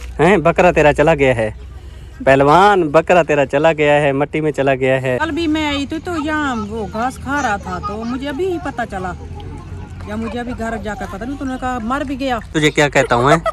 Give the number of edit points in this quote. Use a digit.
2